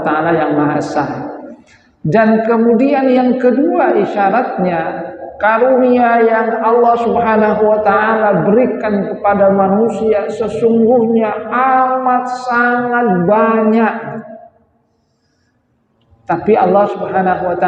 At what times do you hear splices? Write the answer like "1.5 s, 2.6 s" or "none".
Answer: none